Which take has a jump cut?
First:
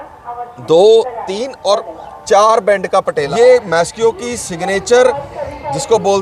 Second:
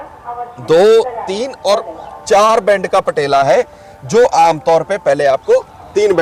first; 1 cut; at 3.2 s

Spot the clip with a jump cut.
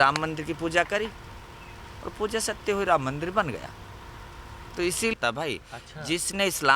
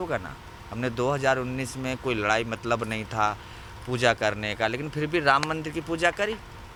first; 1 cut; at 5.1 s

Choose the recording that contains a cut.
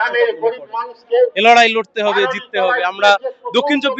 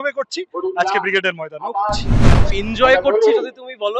second; 1 cut; at 2.4 s

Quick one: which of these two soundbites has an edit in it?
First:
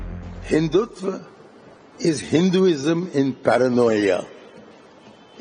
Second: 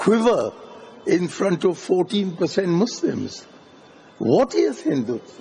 first; 1 cut; at 3.7 s

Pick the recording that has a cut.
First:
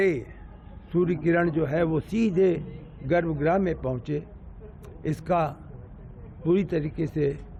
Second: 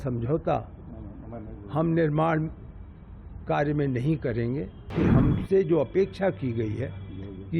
second; 1 cut; at 4.9 s

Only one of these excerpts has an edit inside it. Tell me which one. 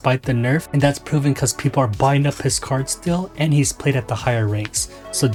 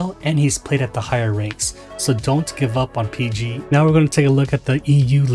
second; 1 cut; at 3.6 s

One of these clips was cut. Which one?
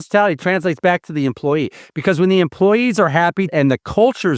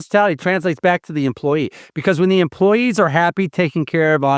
first; 1 cut; at 3.5 s

